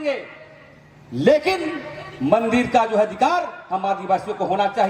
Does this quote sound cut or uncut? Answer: uncut